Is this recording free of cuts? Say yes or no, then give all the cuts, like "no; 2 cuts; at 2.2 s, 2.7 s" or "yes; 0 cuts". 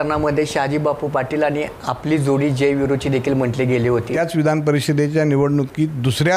no; 1 cut; at 4.1 s